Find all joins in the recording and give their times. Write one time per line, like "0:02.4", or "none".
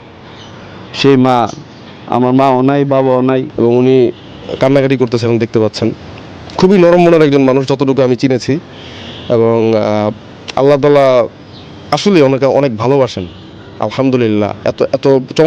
0:03.5